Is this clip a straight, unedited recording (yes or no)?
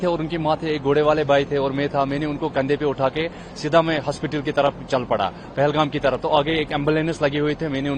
yes